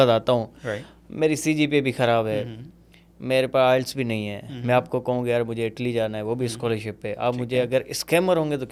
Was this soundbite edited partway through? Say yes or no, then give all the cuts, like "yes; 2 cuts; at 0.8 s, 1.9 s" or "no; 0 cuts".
no; 0 cuts